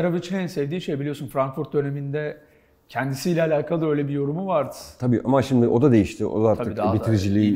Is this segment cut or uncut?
uncut